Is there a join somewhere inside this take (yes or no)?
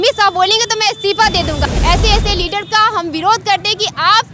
yes